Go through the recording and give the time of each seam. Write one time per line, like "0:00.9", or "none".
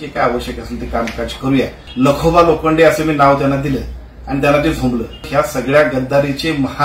0:01.8
0:05.3